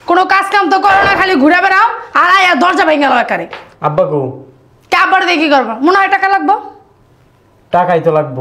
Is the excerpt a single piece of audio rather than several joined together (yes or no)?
yes